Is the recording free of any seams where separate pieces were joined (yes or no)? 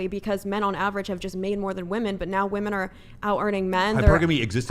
yes